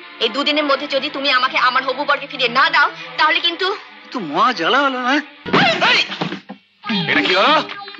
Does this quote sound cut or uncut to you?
cut